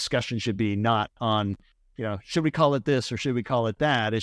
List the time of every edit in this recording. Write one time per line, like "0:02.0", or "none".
none